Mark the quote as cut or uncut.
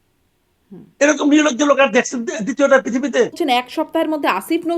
cut